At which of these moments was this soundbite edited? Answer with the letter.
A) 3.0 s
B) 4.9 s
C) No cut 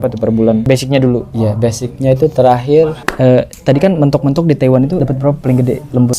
A